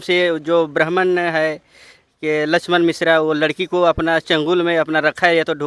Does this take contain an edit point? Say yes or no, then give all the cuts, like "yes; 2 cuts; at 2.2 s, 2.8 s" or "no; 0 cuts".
no; 0 cuts